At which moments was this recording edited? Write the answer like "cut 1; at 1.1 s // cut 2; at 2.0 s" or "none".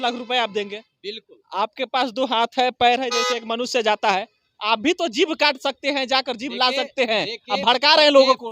none